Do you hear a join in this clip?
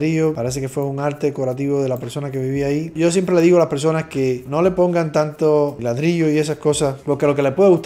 no; 0 cuts

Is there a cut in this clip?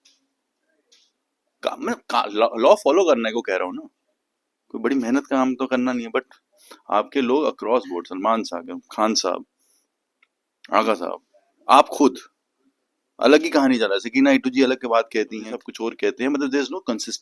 yes; 1 cut; at 15.6 s

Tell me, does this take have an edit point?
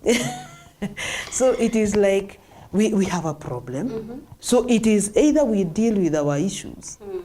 yes; 1 cut; at 4.4 s

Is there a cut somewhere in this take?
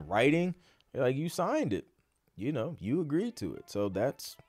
no; 0 cuts

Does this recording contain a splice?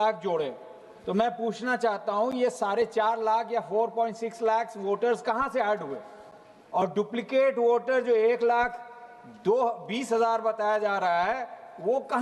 no; 0 cuts

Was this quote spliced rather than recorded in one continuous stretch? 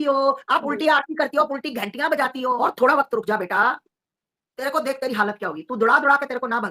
yes; 1 cut; at 2.6 s

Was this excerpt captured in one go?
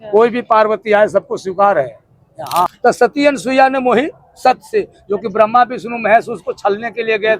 no; 1 cut; at 2.7 s

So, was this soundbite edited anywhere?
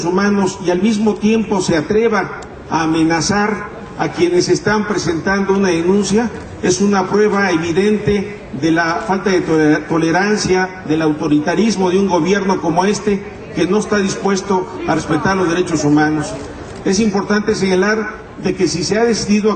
yes; 1 cut; at 15.7 s

